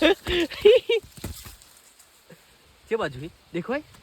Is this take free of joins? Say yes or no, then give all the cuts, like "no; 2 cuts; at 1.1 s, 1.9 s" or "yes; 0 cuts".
yes; 0 cuts